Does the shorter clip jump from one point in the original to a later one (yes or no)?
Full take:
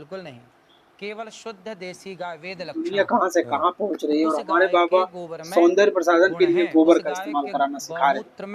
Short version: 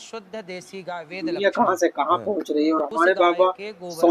yes